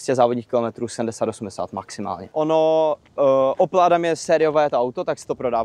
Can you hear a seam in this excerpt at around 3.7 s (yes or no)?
no